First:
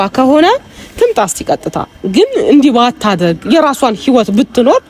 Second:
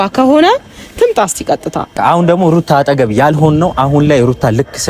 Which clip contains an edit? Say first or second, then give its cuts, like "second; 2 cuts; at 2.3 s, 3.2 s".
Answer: second; 1 cut; at 1.9 s